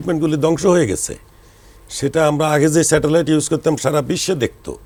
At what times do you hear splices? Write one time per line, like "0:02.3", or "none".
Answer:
none

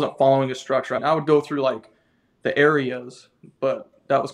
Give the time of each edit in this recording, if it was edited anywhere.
0:01.0

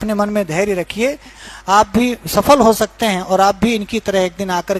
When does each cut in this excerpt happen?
0:01.4

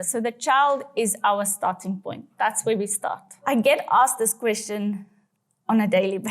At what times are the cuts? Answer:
0:03.3

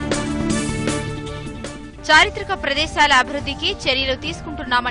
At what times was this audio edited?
0:01.2

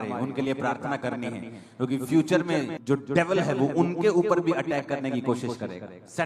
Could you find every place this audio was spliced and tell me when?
none

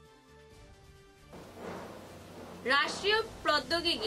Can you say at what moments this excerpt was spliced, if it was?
0:01.2

